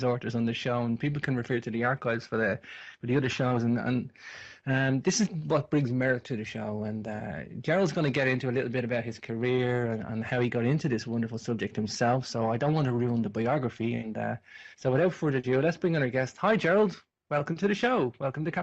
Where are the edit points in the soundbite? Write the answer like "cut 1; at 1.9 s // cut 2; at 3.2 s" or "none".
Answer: cut 1; at 15.6 s